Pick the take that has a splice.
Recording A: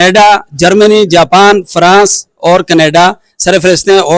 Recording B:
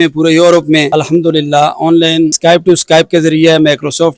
B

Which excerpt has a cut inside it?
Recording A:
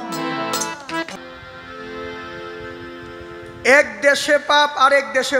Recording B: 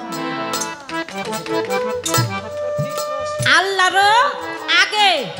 A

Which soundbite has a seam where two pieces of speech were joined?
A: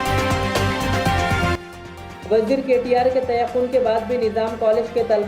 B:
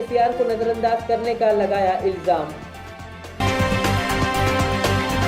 A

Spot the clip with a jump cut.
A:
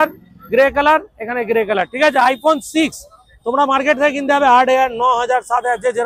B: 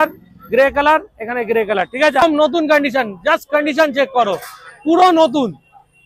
B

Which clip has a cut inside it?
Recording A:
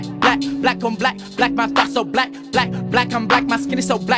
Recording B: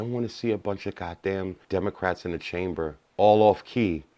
B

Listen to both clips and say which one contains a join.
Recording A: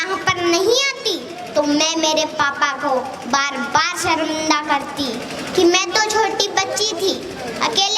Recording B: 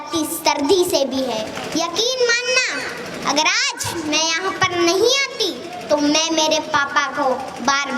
B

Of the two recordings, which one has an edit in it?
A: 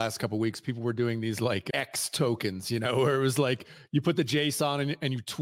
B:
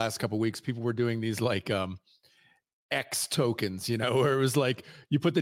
A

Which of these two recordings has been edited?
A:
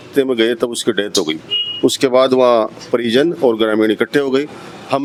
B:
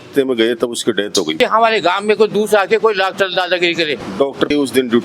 B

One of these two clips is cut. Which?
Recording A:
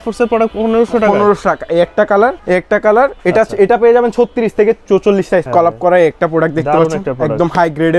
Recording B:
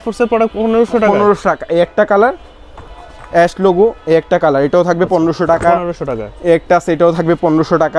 A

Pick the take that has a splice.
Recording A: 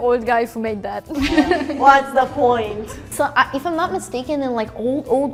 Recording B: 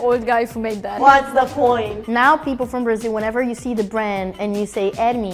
B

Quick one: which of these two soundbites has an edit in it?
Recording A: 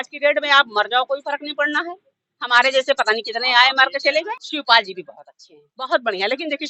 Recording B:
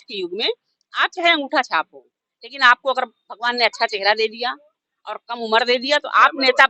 A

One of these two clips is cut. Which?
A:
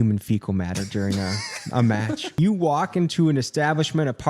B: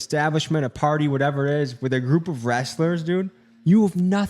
A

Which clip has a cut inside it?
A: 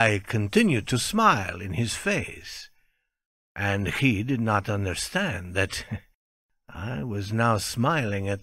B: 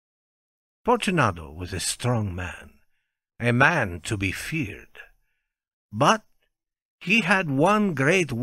A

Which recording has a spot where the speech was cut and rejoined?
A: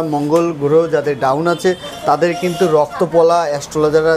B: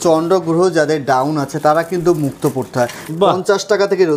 B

